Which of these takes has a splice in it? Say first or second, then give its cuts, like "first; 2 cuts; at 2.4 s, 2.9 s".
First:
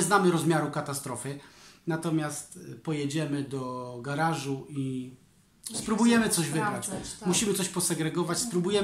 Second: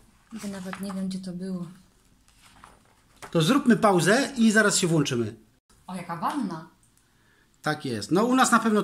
second; 1 cut; at 5.5 s